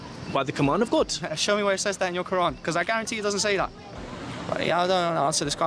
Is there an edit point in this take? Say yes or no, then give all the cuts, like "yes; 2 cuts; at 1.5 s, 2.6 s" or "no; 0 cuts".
yes; 1 cut; at 3.9 s